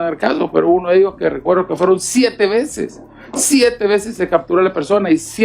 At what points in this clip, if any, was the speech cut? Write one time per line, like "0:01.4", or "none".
none